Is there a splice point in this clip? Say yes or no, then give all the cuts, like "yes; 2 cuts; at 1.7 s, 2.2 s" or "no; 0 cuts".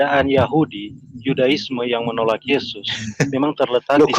no; 0 cuts